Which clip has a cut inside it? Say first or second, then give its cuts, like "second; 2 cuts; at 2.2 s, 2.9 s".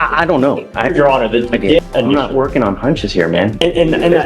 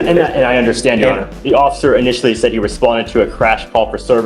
first; 1 cut; at 1.8 s